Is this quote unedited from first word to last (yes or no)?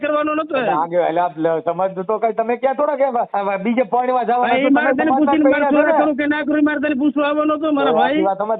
no